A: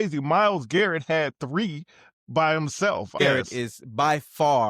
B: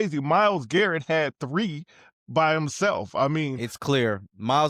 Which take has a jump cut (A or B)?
A